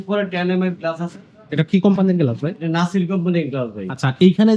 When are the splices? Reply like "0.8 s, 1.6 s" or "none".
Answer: none